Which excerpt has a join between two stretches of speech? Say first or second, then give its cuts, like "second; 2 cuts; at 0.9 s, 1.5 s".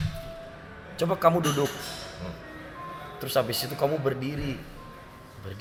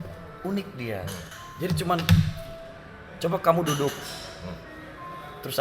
second; 1 cut; at 1.3 s